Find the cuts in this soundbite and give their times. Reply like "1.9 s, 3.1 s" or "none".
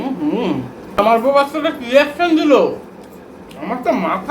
1.0 s